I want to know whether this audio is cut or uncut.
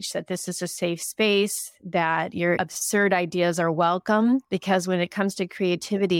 cut